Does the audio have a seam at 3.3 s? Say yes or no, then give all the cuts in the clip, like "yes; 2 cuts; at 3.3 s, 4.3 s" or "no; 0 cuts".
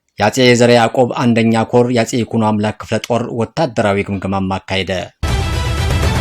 no; 1 cut; at 5.2 s